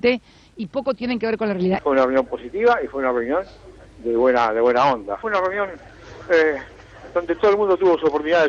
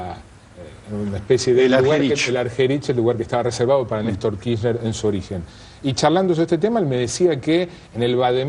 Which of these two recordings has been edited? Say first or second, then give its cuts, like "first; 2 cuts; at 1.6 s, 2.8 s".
first; 2 cuts; at 1.8 s, 5.2 s